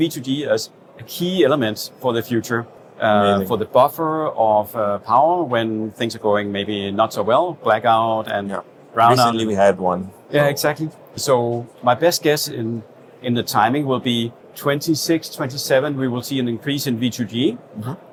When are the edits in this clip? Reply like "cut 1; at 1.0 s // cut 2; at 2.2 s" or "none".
none